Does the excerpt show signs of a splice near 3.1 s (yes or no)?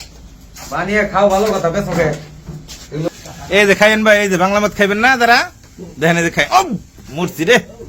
yes